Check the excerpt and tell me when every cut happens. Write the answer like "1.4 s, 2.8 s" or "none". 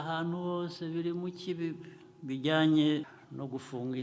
3.1 s